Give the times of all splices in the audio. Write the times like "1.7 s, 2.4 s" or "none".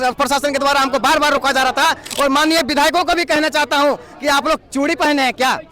2.1 s